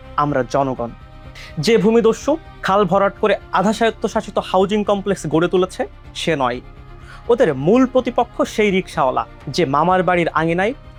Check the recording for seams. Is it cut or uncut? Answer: uncut